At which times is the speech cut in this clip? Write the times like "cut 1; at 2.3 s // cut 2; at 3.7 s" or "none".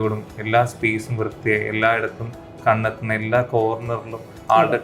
none